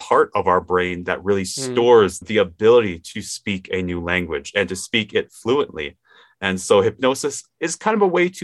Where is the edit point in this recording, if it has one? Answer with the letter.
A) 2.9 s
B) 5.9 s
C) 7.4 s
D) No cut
C